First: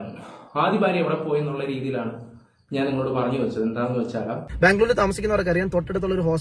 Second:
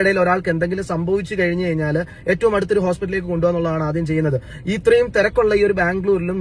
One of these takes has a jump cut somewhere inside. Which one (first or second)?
first